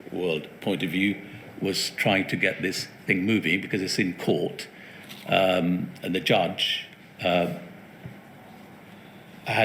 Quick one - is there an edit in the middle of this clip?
no; 0 cuts

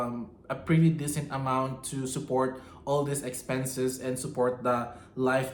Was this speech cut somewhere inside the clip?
no; 0 cuts

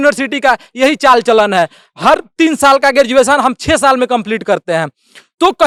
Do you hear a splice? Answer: no; 0 cuts

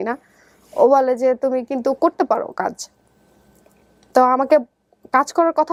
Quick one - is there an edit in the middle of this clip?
no; 0 cuts

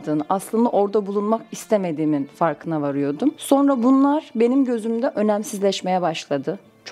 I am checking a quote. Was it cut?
yes; 1 cut; at 3.4 s

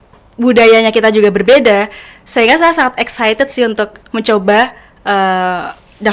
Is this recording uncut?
yes; 0 cuts

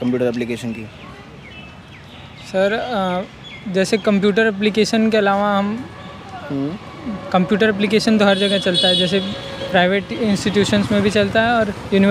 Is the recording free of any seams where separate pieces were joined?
yes; 0 cuts

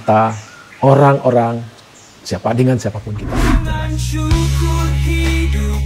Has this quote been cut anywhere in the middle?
yes; 1 cut; at 3.6 s

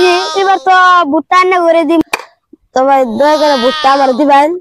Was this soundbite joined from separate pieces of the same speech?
yes; 1 cut; at 2.0 s

